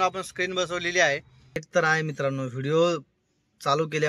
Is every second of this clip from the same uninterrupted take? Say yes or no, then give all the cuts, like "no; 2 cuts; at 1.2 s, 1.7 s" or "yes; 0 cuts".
no; 1 cut; at 1.6 s